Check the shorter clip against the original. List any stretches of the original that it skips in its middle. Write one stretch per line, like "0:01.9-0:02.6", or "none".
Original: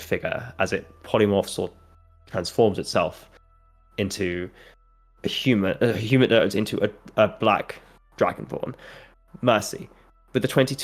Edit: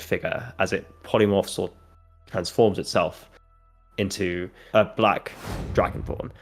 0:04.6-0:07.0